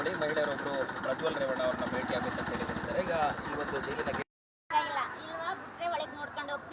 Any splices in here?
yes; 1 cut; at 4.2 s

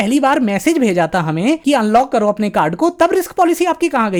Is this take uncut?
yes; 0 cuts

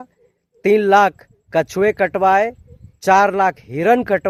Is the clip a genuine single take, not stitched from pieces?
yes; 0 cuts

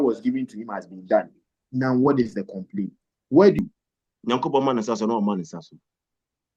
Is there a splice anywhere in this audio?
yes; 1 cut; at 3.6 s

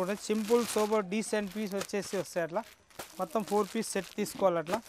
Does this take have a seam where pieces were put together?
no; 0 cuts

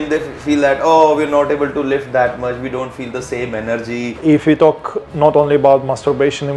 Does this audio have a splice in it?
yes; 1 cut; at 4.2 s

